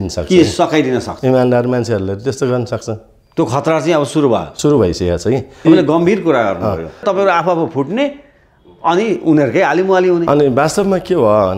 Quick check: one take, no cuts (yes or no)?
no